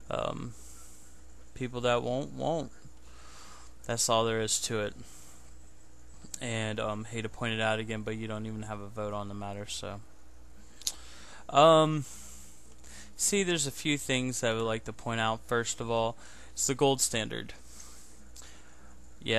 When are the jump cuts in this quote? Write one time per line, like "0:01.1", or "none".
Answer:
0:13.7